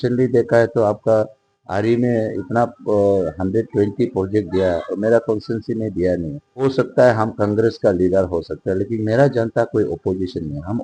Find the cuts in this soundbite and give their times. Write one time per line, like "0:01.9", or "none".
0:06.4